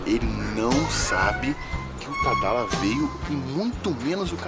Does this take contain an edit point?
no; 0 cuts

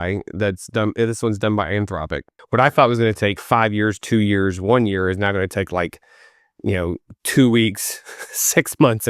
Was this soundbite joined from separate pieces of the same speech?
yes; 1 cut; at 2.3 s

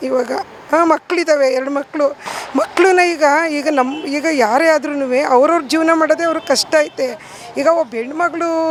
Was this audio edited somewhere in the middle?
no; 0 cuts

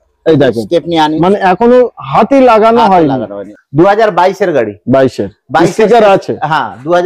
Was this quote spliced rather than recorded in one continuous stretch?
no; 0 cuts

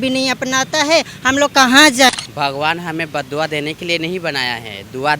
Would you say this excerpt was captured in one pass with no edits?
no; 1 cut; at 2.1 s

